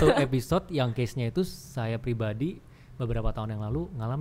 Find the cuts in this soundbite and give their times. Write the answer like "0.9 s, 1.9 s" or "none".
none